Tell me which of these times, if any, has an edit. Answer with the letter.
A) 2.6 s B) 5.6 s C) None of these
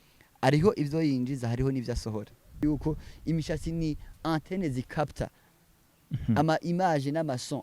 A